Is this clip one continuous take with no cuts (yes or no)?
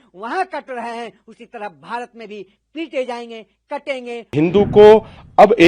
no